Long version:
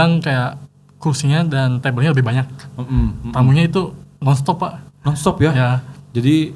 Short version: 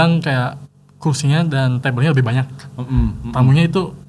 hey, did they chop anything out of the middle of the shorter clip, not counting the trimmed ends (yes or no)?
no